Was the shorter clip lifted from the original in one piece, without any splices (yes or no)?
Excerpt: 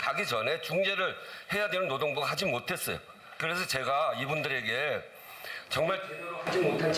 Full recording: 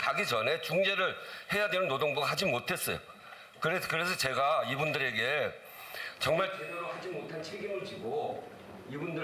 no